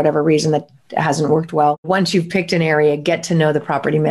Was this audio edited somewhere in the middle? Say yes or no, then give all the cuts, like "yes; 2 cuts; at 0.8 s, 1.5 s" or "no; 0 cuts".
yes; 1 cut; at 1.9 s